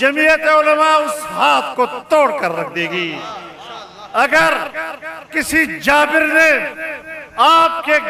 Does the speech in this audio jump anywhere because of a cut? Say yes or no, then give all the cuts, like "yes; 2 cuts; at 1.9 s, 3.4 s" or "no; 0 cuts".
no; 0 cuts